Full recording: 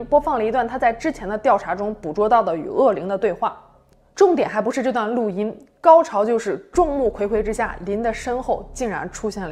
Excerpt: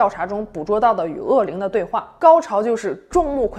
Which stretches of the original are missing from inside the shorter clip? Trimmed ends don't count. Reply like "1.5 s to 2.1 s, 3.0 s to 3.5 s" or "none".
3.5 s to 5.7 s

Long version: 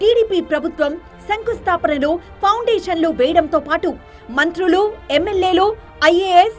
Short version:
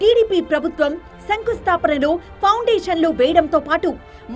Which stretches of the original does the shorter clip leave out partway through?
none

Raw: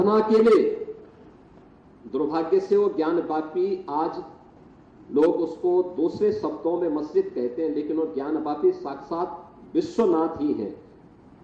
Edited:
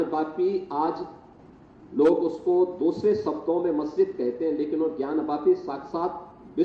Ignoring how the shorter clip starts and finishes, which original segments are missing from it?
none

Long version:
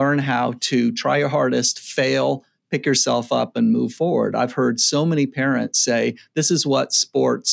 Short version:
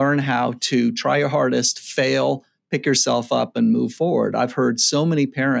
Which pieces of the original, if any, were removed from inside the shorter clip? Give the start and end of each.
none

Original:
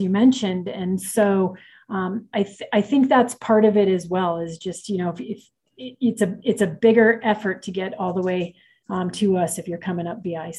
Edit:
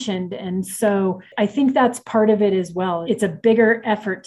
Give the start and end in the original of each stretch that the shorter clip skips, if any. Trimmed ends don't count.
1.6 s to 2.6 s, 4.4 s to 6.4 s

